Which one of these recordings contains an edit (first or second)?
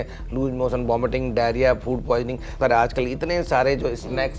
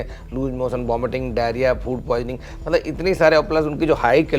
first